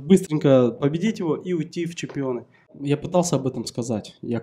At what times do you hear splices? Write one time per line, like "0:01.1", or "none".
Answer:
0:02.7